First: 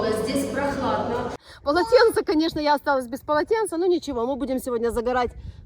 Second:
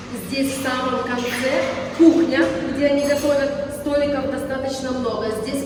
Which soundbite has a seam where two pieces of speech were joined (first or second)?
first